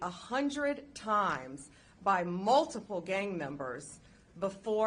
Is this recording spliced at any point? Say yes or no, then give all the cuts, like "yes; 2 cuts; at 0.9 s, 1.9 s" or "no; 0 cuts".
no; 0 cuts